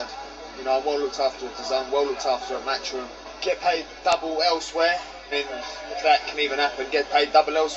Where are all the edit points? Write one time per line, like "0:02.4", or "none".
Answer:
0:03.2
0:05.2